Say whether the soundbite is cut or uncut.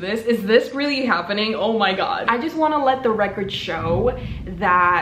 cut